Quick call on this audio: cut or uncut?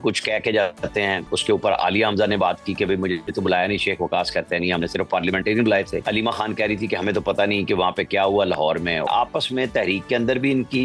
cut